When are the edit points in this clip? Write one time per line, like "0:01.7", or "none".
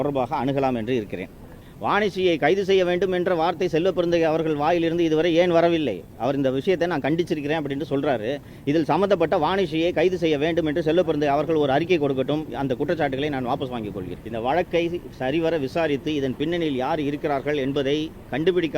0:01.6
0:14.1